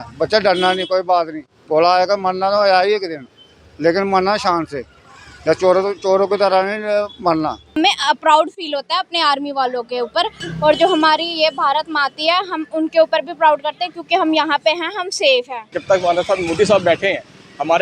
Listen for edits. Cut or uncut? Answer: cut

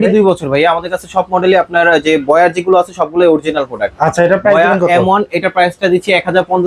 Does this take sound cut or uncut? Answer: uncut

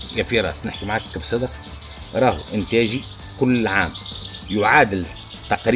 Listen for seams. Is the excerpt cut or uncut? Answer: uncut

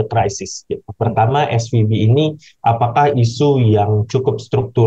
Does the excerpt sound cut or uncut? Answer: uncut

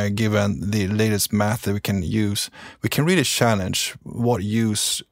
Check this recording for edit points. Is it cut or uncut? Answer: uncut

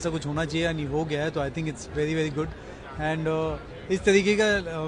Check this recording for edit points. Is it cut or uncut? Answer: uncut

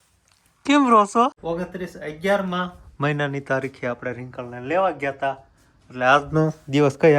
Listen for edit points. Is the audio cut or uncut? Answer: cut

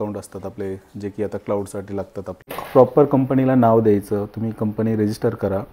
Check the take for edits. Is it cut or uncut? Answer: cut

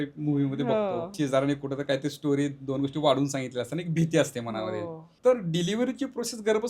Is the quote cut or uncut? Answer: cut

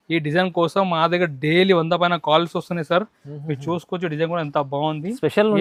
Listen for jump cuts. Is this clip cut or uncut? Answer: uncut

